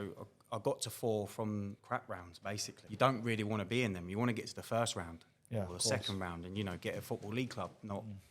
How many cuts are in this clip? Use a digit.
2